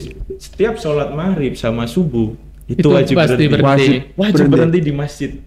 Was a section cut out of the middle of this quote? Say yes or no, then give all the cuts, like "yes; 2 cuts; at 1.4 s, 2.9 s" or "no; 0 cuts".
no; 0 cuts